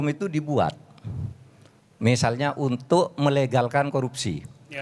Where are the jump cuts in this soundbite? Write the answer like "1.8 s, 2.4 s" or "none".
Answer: none